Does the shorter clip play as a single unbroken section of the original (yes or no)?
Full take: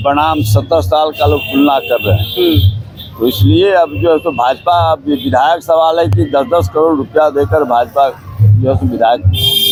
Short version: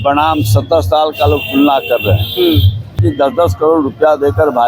no